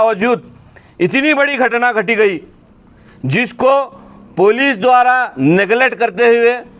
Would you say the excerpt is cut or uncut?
uncut